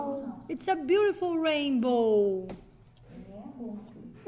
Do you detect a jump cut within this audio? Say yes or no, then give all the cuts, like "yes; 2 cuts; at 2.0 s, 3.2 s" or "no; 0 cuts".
no; 0 cuts